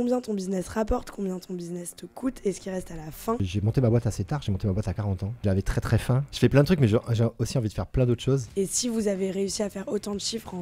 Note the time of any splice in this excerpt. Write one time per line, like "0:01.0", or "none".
0:03.4
0:05.8
0:08.5